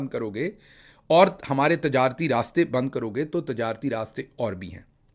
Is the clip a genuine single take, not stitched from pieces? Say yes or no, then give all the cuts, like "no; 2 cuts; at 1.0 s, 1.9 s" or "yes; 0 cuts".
yes; 0 cuts